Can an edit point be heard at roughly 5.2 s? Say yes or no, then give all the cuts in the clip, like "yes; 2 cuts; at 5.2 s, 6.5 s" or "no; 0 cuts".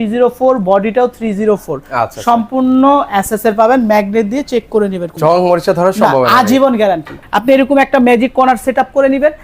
yes; 2 cuts; at 5.2 s, 7.1 s